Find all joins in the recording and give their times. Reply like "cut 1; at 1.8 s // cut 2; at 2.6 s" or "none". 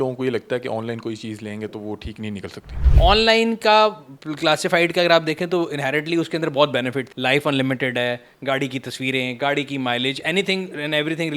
cut 1; at 2.8 s // cut 2; at 7.1 s